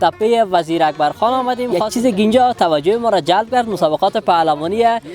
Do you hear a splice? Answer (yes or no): yes